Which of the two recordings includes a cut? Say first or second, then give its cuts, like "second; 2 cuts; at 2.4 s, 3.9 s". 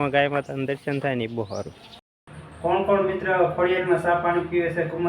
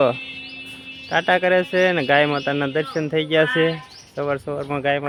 first; 1 cut; at 2.2 s